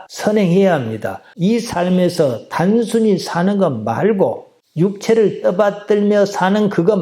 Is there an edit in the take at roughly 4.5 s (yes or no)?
no